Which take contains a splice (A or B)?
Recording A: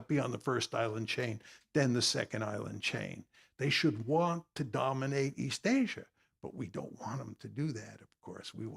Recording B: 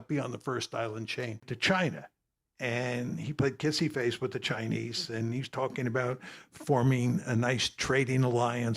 B